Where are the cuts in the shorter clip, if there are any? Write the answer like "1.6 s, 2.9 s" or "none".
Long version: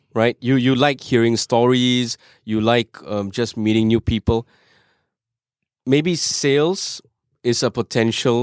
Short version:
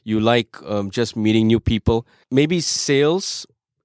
2.2 s